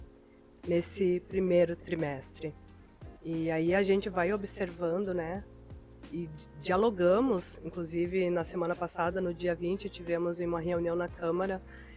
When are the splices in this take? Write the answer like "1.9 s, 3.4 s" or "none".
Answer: 1.8 s